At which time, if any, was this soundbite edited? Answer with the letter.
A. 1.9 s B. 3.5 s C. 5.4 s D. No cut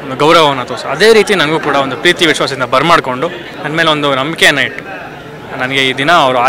B